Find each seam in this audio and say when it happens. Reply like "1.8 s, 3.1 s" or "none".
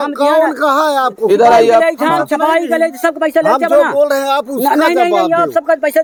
none